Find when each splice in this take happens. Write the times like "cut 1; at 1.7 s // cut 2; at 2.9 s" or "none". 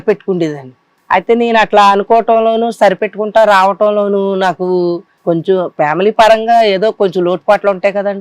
cut 1; at 0.9 s // cut 2; at 5.1 s